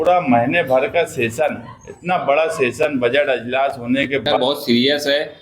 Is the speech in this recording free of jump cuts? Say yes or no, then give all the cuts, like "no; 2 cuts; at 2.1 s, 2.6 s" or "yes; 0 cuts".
no; 1 cut; at 4.3 s